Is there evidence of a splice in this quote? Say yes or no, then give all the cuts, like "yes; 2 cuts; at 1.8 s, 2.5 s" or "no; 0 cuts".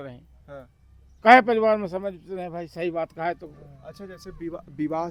no; 0 cuts